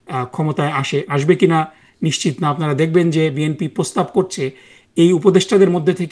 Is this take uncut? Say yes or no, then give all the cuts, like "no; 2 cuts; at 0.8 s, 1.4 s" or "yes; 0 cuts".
yes; 0 cuts